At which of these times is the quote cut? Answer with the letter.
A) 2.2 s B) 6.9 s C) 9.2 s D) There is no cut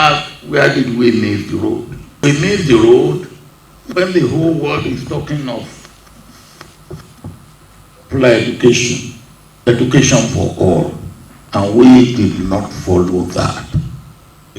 A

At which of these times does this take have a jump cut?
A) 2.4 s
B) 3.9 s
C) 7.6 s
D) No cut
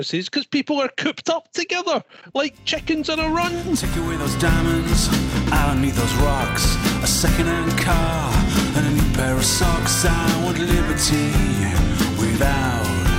B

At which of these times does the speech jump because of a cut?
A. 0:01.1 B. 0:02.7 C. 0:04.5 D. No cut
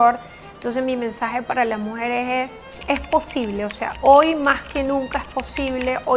B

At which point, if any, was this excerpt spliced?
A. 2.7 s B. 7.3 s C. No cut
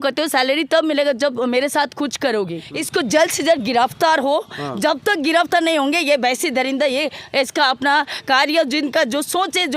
A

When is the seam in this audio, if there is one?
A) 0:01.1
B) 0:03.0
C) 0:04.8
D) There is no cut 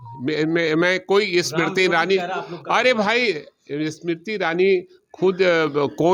D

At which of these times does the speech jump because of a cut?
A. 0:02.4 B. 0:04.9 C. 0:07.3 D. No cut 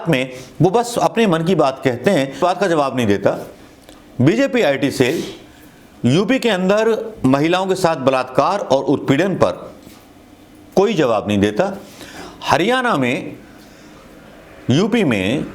A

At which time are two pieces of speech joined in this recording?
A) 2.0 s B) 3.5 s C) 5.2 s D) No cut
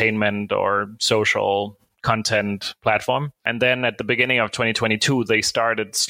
B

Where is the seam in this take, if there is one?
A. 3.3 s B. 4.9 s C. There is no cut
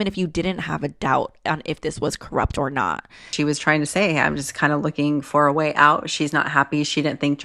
A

